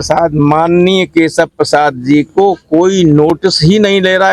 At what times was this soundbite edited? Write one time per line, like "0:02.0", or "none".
none